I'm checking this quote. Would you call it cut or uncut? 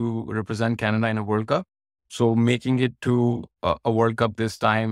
uncut